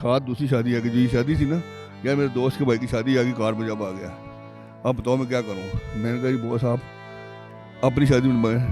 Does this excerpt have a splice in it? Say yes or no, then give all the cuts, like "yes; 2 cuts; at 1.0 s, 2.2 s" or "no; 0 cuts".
no; 0 cuts